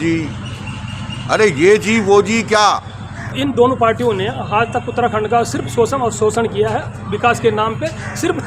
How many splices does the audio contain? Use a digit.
1